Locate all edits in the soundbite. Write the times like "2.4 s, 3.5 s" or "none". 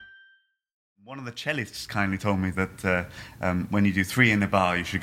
1.0 s